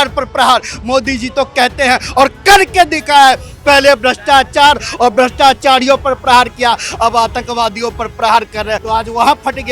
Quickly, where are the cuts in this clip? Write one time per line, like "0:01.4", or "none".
0:08.8